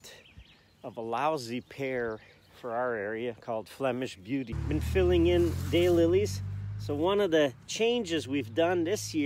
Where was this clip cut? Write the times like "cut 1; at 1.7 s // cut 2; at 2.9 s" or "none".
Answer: cut 1; at 4.6 s